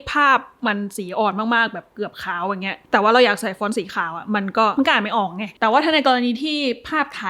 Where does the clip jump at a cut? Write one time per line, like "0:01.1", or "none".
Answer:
0:02.8
0:05.1